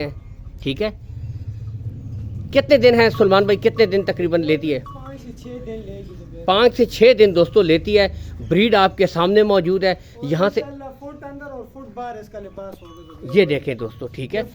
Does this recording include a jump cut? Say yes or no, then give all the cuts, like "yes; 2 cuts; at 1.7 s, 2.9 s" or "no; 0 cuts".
no; 0 cuts